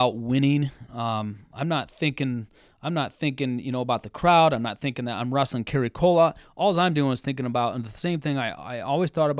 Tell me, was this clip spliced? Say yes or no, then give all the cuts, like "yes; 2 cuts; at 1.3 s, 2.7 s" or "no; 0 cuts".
no; 0 cuts